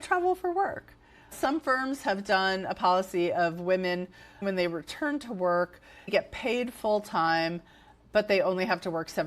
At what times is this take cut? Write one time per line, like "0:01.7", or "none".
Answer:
0:01.3
0:04.4